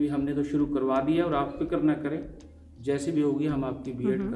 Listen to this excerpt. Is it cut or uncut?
uncut